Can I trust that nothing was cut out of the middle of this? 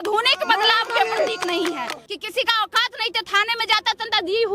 no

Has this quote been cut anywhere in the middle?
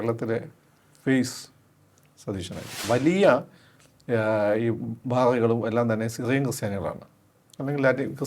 yes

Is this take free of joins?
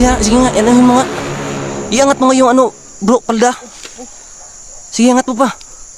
yes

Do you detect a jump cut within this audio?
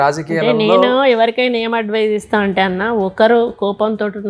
no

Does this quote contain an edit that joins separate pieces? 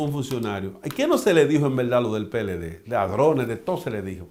no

